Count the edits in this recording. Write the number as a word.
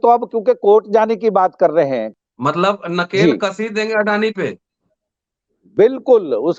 one